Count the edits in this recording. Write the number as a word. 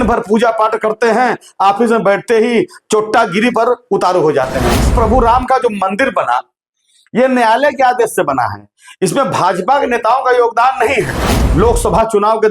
two